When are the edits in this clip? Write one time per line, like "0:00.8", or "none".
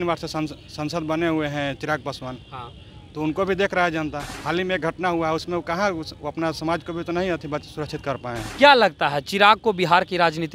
0:04.3
0:08.5